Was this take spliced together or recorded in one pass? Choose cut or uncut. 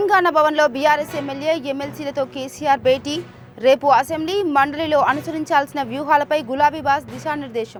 uncut